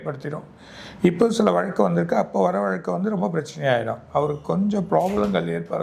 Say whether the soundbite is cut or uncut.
uncut